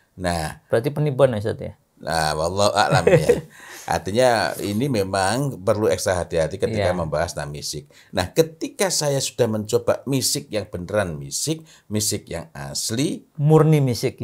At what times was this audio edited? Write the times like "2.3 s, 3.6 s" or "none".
none